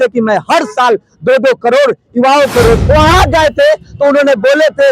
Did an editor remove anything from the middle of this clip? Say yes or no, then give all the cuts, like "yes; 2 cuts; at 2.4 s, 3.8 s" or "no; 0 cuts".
yes; 1 cut; at 2.8 s